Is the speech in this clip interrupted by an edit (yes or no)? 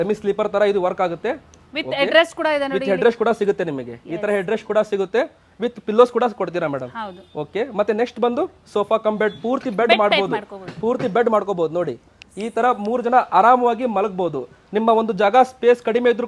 no